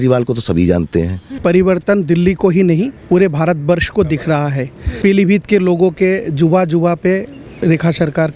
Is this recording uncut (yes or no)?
no